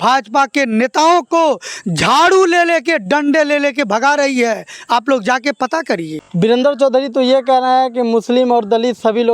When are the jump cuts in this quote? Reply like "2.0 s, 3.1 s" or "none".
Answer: 6.2 s

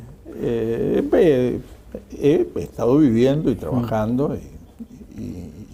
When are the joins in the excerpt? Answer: none

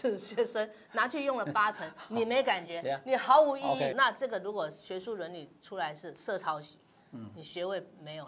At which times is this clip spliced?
3.9 s

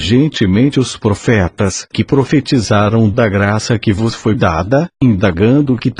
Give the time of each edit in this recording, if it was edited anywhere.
none

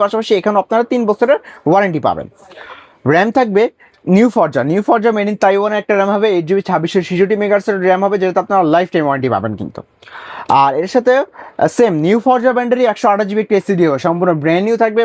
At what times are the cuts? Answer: none

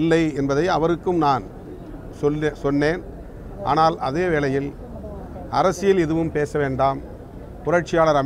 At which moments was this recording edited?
none

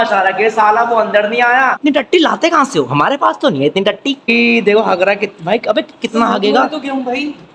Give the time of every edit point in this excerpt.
1.8 s, 4.3 s

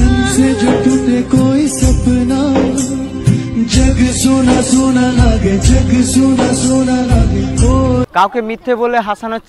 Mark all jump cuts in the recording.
8.0 s

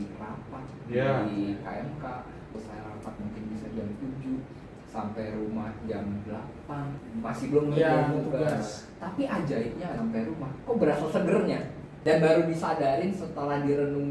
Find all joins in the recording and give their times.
2.6 s, 7.0 s, 9.9 s, 11.9 s

